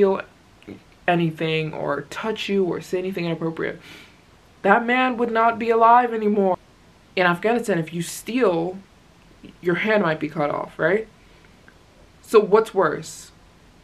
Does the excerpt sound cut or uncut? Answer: uncut